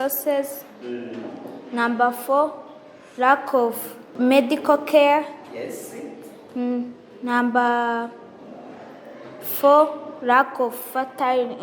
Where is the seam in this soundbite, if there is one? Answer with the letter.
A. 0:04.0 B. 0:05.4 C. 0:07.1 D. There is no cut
A